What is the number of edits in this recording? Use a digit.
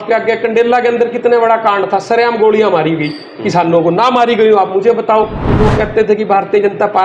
1